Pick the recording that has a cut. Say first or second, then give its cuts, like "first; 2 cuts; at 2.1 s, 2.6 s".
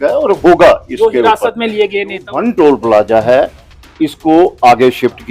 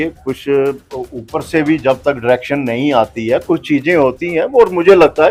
first; 1 cut; at 2.3 s